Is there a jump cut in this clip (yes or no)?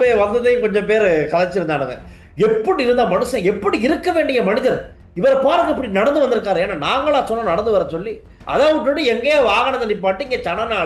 yes